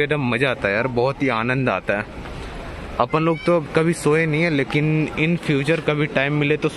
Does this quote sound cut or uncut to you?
uncut